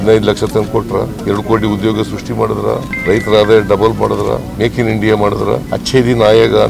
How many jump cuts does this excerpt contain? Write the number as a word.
four